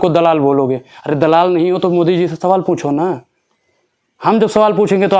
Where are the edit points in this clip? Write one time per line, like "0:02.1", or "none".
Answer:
none